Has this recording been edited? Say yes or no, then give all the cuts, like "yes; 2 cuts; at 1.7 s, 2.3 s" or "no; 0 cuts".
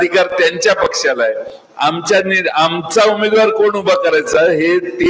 no; 0 cuts